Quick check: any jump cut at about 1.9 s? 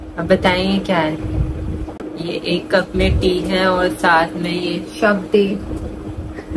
yes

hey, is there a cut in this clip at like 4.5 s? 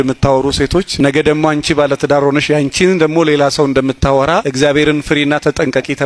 yes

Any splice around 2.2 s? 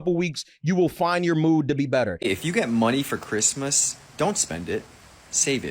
yes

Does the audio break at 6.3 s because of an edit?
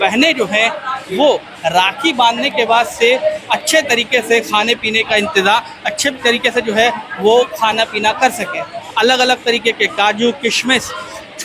no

